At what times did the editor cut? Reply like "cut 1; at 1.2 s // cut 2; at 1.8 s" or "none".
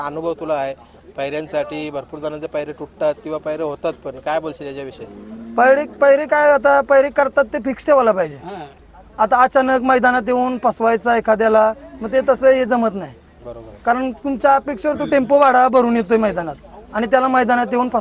none